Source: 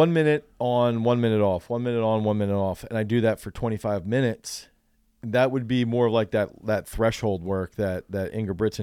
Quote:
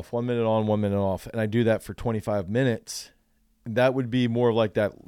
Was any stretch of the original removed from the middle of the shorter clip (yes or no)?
no